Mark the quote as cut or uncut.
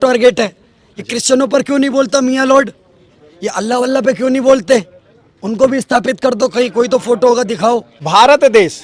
cut